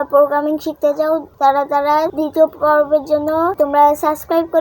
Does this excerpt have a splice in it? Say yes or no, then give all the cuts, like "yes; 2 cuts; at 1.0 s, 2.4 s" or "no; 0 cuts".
yes; 3 cuts; at 1.3 s, 2.1 s, 3.5 s